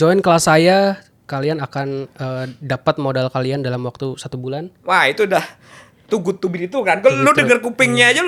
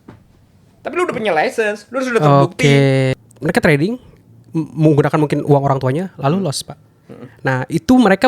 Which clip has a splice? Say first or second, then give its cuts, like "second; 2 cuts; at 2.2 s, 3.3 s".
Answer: second; 1 cut; at 3.2 s